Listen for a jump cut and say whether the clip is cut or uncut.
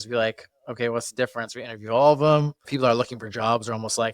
cut